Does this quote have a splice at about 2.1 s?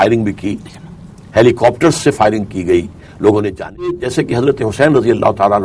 no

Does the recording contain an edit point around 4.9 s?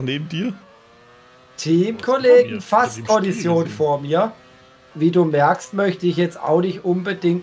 yes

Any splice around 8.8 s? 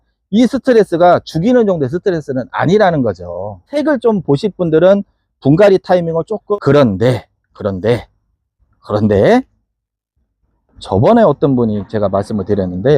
no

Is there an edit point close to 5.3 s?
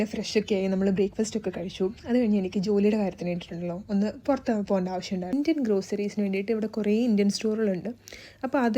yes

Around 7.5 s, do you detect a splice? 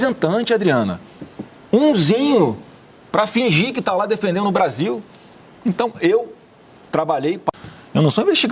yes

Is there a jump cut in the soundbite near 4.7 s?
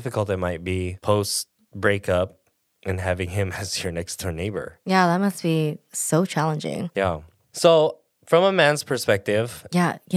yes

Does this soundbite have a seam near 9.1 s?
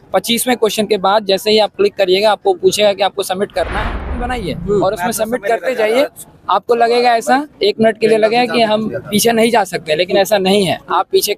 no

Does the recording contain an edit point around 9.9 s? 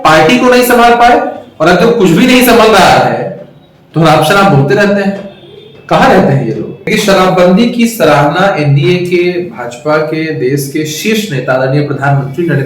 no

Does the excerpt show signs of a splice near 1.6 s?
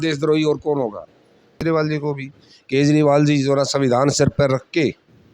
yes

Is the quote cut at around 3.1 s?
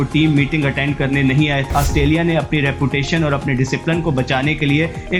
no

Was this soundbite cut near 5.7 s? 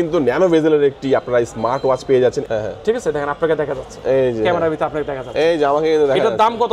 no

